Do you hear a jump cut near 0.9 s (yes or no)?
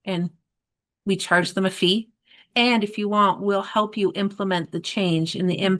no